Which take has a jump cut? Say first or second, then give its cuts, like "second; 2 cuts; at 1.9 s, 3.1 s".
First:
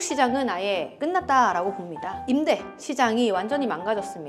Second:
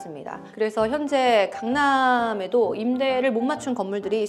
first; 1 cut; at 2.2 s